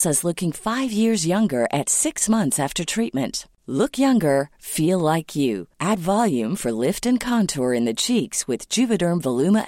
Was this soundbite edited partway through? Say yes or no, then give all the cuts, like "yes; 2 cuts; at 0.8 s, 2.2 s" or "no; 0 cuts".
no; 0 cuts